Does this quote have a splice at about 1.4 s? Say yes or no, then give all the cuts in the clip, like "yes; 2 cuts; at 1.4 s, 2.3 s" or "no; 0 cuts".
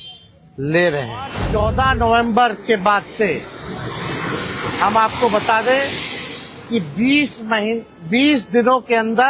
yes; 1 cut; at 1.4 s